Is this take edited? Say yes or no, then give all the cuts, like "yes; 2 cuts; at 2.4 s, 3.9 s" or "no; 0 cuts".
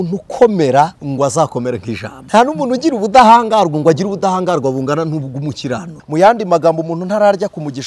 yes; 3 cuts; at 1.0 s, 2.2 s, 5.9 s